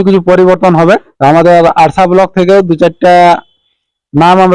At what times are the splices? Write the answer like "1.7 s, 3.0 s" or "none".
1.1 s